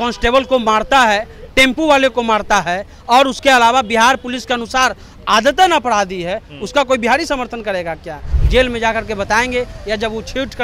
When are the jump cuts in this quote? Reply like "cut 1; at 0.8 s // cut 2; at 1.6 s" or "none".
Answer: cut 1; at 8.4 s